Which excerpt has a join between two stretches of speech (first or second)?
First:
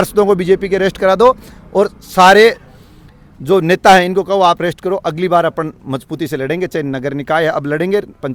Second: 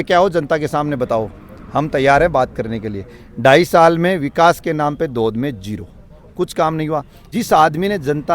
second